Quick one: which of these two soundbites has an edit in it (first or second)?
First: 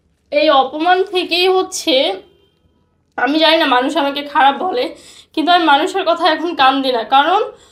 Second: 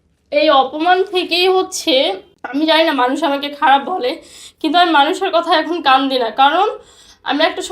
second